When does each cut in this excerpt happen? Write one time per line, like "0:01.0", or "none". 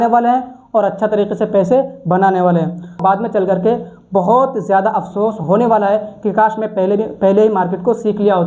0:03.0